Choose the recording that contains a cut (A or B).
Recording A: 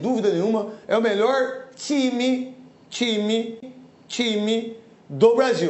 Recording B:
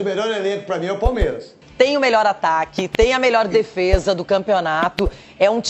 B